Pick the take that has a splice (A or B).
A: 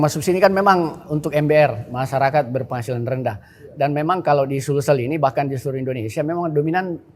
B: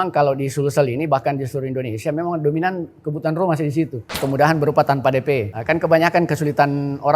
B